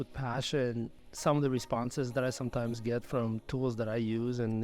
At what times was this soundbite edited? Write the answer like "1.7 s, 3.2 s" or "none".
1.0 s